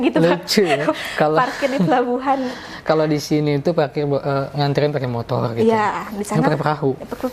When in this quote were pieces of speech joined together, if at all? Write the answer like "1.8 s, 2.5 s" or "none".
none